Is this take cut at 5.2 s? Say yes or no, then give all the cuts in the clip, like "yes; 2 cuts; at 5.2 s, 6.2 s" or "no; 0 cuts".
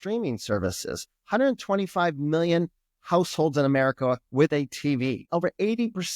yes; 1 cut; at 5.2 s